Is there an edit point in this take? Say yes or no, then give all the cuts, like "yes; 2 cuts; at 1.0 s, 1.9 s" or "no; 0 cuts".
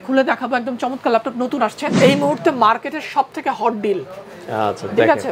yes; 1 cut; at 1.9 s